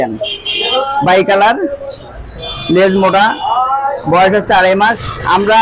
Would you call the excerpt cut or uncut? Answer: uncut